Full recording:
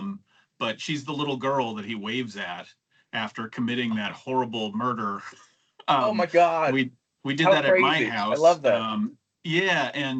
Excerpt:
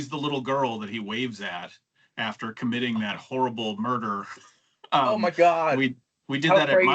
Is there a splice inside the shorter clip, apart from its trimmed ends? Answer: no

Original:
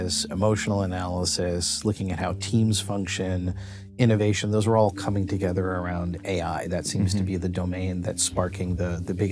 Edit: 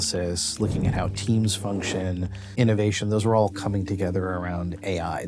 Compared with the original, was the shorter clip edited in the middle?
yes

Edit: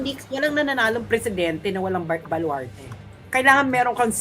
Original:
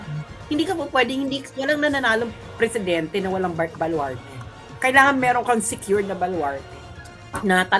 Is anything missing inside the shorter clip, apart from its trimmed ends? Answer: yes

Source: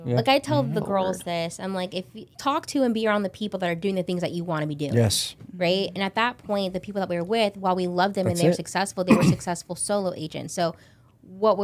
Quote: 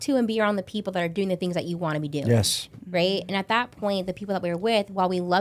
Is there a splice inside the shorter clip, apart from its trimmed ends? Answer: no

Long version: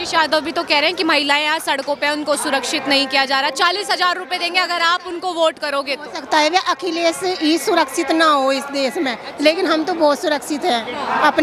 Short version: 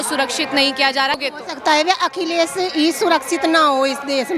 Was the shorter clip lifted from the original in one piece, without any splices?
no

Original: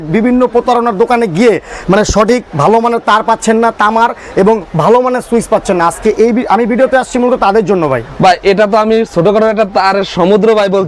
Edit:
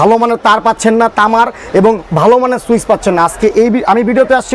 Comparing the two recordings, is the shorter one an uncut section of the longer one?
yes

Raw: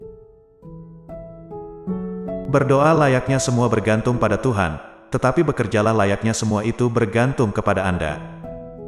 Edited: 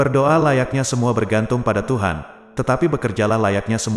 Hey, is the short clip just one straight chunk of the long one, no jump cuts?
yes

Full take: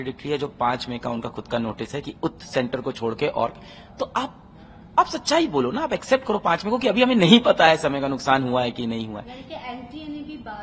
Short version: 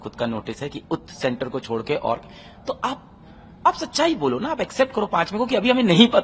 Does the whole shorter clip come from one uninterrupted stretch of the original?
yes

